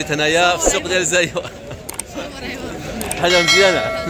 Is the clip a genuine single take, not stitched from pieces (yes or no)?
yes